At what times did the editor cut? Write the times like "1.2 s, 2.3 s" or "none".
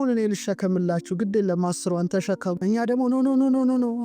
2.6 s